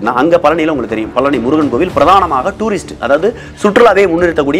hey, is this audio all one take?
yes; 0 cuts

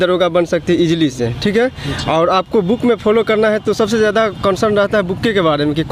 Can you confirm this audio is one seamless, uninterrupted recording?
yes; 0 cuts

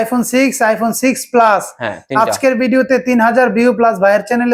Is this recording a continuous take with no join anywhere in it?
yes; 0 cuts

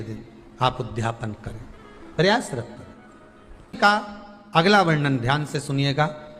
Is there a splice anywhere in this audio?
yes; 1 cut; at 3.8 s

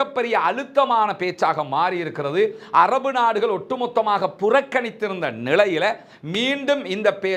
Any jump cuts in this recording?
no; 0 cuts

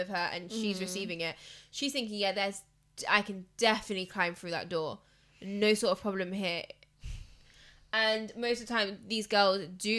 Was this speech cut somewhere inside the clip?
no; 0 cuts

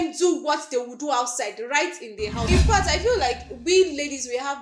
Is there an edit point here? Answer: yes; 1 cut; at 2.5 s

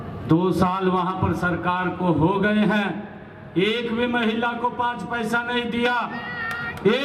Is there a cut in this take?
no; 0 cuts

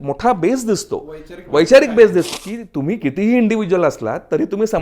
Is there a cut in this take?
yes; 1 cut; at 2.3 s

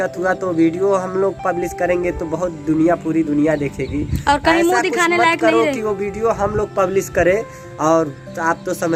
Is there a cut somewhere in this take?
no; 0 cuts

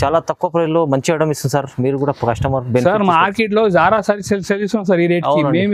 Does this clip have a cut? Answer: no; 0 cuts

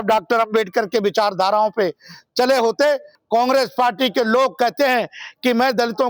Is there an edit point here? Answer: yes; 1 cut; at 3.1 s

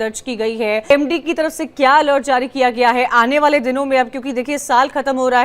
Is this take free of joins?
no; 1 cut; at 0.9 s

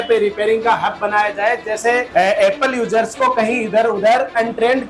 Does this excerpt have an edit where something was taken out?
yes; 1 cut; at 2.1 s

